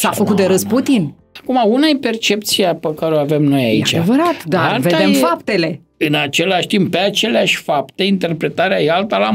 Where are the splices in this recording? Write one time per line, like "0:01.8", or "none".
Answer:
0:01.3
0:05.8